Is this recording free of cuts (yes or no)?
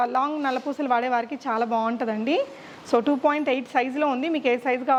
yes